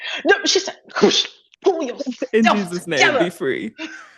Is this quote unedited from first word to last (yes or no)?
yes